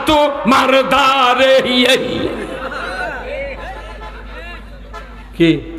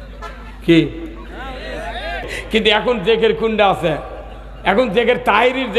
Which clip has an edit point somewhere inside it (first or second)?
second